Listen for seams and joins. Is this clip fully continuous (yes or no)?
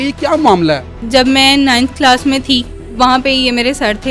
no